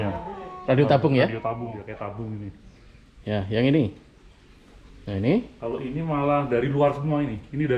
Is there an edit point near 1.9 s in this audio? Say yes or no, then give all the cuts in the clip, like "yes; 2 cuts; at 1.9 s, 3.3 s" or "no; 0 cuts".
yes; 1 cut; at 1.9 s